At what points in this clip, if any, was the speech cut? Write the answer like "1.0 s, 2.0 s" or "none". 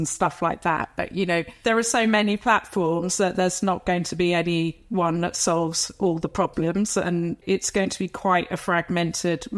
7.4 s